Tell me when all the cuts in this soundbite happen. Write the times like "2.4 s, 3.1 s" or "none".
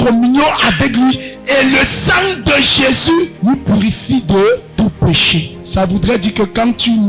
3.3 s, 4.7 s, 5.6 s